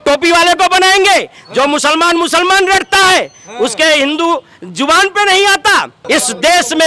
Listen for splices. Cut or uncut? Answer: cut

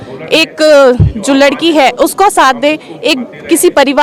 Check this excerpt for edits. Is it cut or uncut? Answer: uncut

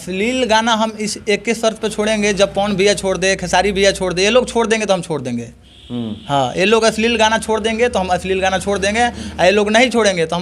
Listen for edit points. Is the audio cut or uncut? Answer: uncut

